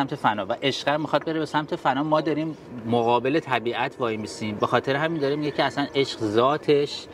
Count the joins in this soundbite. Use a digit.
0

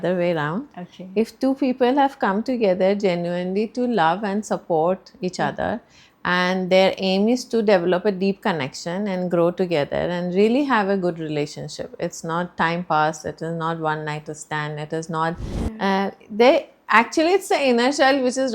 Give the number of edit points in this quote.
1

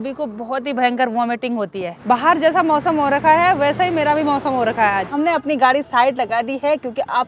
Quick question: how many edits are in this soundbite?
2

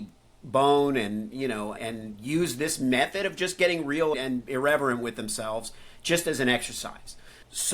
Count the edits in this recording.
2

